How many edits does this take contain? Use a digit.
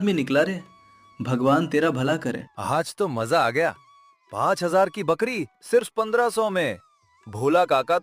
1